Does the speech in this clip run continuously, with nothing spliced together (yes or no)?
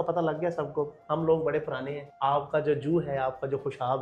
yes